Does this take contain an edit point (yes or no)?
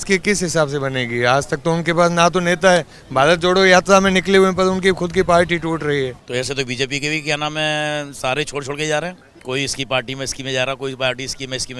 yes